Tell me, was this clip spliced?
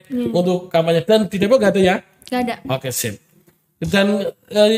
no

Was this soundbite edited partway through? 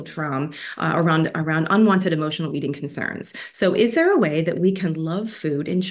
no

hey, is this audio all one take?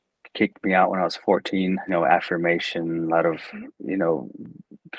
no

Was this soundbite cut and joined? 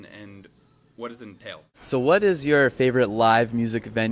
yes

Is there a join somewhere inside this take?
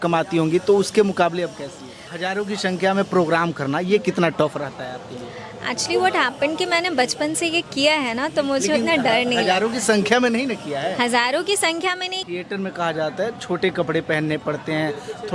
yes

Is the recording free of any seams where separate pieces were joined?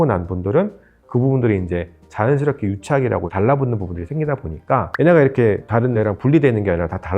no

